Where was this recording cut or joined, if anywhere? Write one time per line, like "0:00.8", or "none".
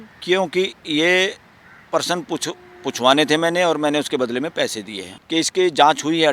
0:05.2